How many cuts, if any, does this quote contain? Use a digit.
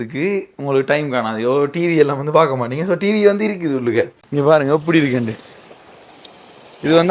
1